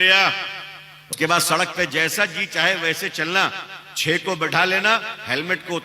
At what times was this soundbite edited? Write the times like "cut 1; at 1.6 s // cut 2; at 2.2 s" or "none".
cut 1; at 1.1 s